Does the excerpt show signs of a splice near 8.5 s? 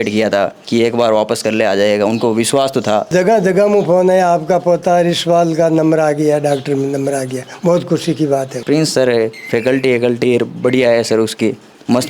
yes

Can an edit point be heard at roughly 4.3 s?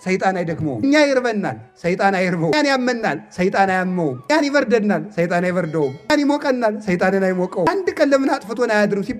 yes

